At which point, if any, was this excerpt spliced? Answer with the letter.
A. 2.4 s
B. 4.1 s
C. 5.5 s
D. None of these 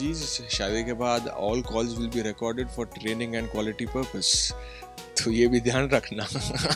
D